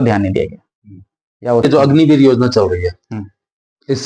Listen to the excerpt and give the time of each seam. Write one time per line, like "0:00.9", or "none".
0:01.6

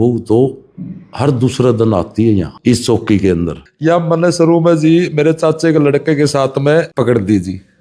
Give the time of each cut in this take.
0:02.5
0:03.6
0:06.9

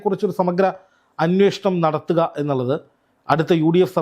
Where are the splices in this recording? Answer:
none

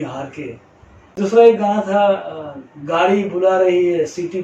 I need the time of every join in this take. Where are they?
0:01.2

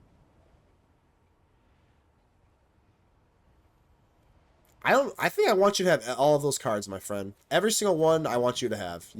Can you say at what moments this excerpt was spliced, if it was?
none

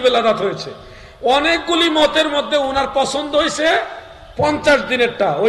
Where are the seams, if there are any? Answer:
none

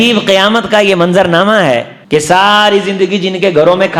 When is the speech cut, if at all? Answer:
0:01.9

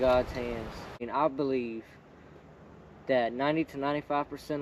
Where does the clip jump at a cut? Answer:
0:01.0

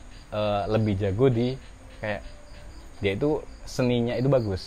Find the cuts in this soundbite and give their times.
none

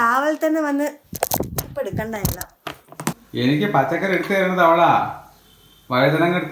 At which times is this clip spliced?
0:03.2

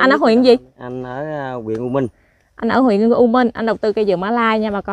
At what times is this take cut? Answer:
none

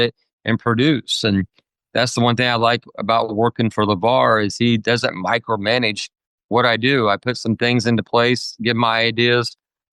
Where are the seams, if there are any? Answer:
none

